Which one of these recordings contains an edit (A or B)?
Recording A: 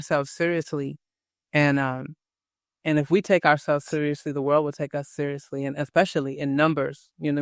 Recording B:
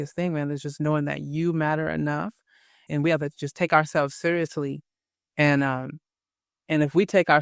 B